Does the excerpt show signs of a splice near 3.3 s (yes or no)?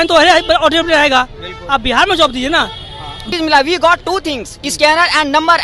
yes